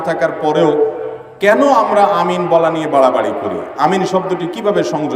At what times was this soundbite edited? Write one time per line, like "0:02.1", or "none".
none